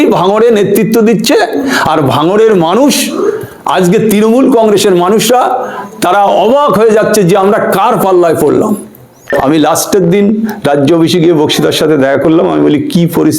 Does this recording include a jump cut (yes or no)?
yes